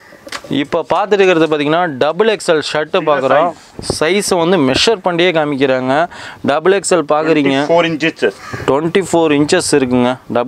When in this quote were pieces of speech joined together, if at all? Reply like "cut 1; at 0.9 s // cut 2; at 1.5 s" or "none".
none